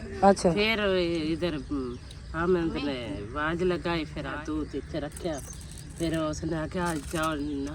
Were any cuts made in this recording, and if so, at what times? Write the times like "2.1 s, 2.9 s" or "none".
4.4 s

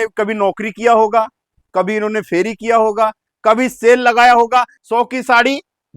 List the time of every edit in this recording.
4.8 s

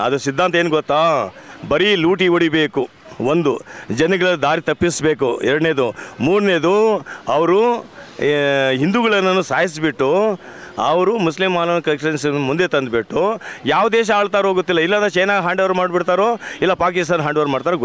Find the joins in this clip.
none

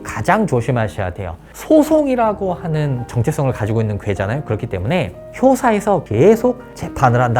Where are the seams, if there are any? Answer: 1.5 s

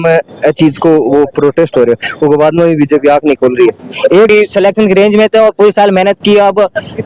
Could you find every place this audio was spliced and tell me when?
4.3 s

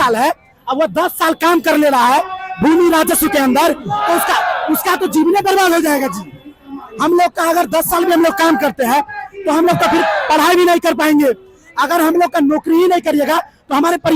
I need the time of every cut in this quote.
none

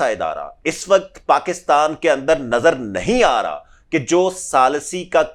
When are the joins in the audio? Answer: none

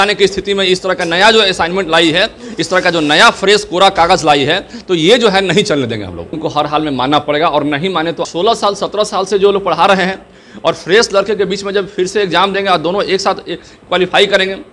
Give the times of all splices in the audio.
6.4 s, 8.3 s

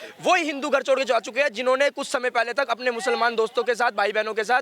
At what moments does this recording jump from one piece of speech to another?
none

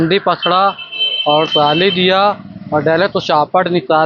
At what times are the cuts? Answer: none

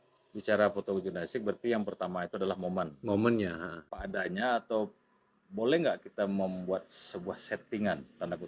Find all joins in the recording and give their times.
3.9 s

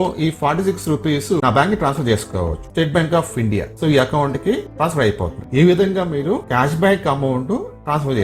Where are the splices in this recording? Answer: 1.4 s, 2.7 s, 5.3 s

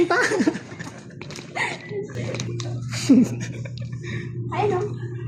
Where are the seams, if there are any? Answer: 2.4 s

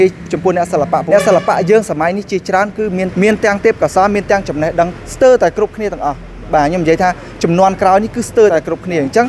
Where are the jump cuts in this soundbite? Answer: 1.0 s, 3.1 s, 5.0 s, 8.5 s

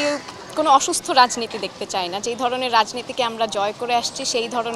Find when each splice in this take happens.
none

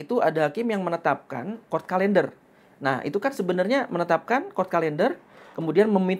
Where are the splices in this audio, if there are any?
none

